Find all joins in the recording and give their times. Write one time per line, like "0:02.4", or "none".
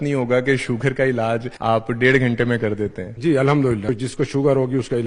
0:01.5
0:03.0
0:03.9